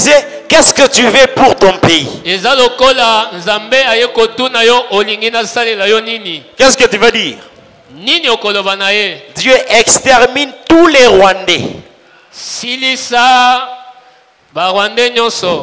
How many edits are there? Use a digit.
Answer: 0